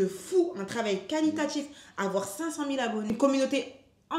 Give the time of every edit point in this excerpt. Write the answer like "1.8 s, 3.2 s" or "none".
3.1 s